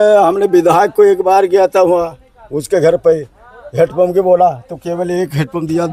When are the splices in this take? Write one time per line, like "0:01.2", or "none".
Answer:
none